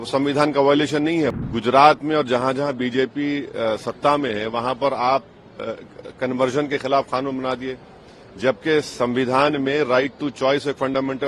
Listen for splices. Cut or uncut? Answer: cut